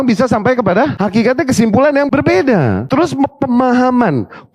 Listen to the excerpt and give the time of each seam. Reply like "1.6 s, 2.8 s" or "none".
0.9 s, 2.1 s, 2.8 s